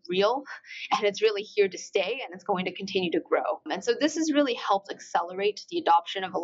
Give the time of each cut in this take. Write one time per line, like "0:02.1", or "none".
0:03.6